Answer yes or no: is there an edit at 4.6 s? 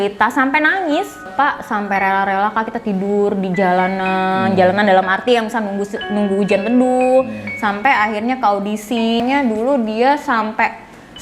no